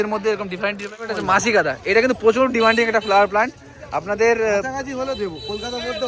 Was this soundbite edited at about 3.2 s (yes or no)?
no